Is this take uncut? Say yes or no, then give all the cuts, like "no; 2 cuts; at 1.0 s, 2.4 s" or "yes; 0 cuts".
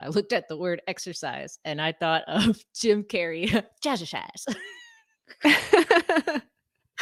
yes; 0 cuts